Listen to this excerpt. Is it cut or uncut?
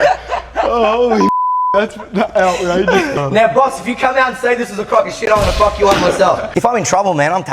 cut